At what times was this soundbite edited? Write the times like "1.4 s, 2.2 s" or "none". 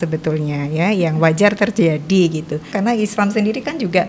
2.7 s